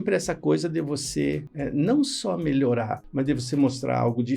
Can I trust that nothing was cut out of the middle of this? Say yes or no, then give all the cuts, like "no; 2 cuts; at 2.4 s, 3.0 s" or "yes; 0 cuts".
no; 2 cuts; at 1.5 s, 3.0 s